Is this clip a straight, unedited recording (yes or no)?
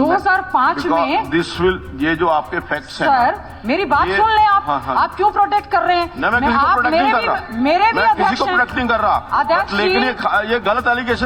yes